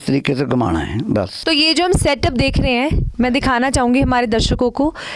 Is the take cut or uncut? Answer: cut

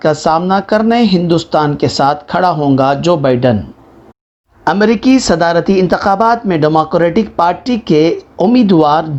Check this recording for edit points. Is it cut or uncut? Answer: uncut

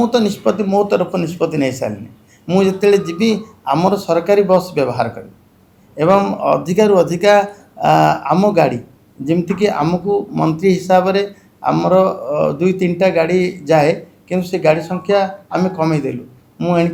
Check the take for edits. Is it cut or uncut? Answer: uncut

